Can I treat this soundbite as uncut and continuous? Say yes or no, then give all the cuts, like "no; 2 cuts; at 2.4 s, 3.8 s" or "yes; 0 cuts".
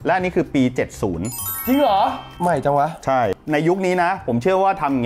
no; 2 cuts; at 2.3 s, 3.3 s